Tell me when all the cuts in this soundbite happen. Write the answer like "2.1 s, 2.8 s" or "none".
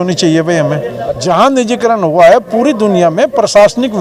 1.1 s